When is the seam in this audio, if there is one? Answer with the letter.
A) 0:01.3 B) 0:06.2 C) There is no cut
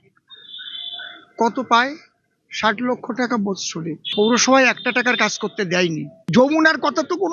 B